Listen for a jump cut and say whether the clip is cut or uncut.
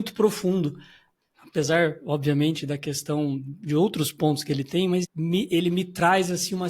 cut